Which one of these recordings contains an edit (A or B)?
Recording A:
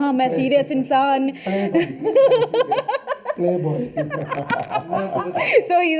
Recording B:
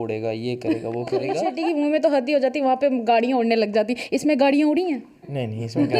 B